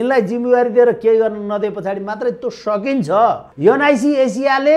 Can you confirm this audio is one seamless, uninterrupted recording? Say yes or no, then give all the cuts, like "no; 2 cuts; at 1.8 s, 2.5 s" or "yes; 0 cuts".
no; 1 cut; at 3.5 s